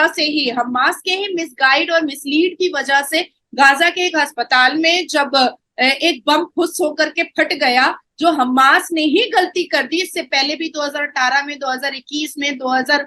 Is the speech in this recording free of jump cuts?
yes; 0 cuts

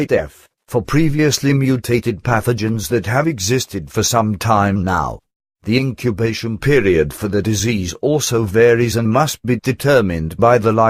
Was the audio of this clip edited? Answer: yes; 1 cut; at 3.4 s

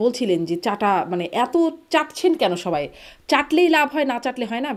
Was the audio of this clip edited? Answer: no; 0 cuts

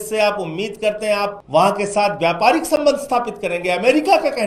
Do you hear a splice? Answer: yes; 1 cut; at 1.4 s

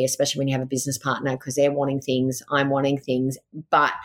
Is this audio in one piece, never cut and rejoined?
yes; 0 cuts

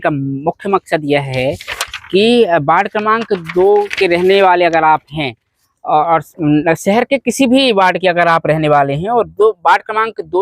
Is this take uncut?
yes; 0 cuts

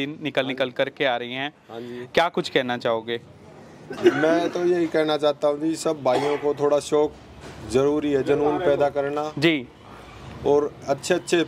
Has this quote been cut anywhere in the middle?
no; 0 cuts

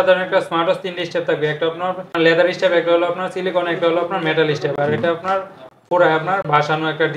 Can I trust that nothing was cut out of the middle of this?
yes; 0 cuts

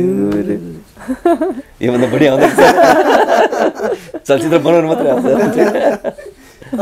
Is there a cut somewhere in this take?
no; 0 cuts

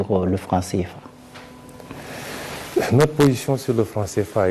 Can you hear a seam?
no; 0 cuts

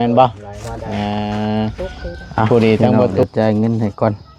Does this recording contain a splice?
yes; 1 cut; at 3.2 s

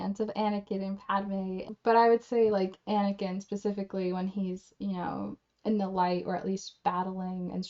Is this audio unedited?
no; 1 cut; at 1.7 s

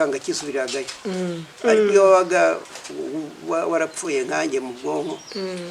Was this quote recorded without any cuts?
no; 1 cut; at 1.5 s

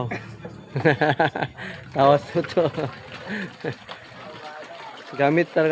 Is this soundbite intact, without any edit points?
yes; 0 cuts

